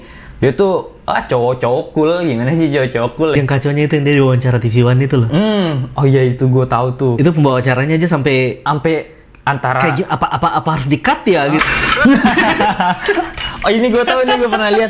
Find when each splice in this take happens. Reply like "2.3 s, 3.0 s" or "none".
3.3 s, 11.6 s